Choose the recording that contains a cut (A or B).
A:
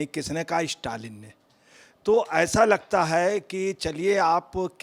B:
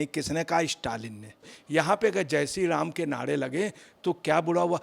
B